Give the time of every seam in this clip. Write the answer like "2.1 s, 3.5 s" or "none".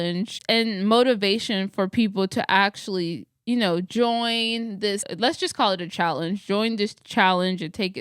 5.1 s

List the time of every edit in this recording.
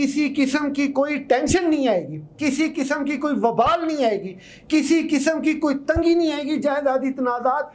none

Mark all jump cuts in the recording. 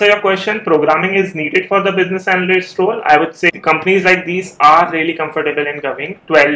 3.6 s

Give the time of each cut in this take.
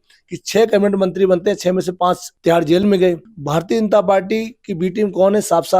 2.3 s, 3.3 s

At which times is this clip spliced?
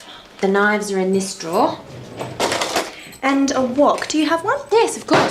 none

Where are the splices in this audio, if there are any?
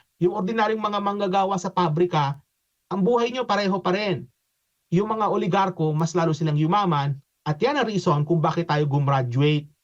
none

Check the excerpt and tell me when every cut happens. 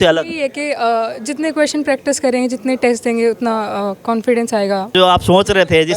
4.9 s

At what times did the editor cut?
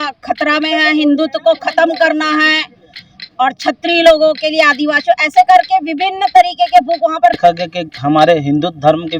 7.4 s

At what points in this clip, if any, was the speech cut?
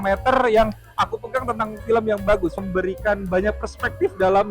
2.5 s

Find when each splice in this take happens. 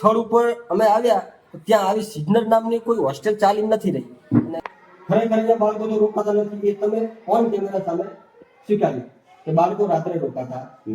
4.5 s

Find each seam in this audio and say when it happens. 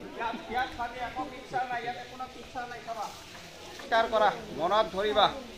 3.8 s

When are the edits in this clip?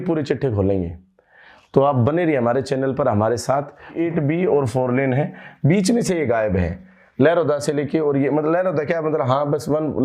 3.9 s

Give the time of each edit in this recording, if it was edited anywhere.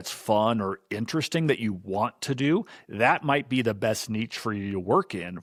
none

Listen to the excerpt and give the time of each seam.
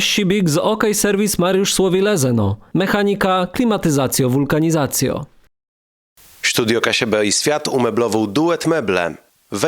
5.8 s

